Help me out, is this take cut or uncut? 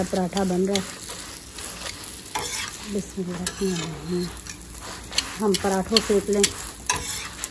uncut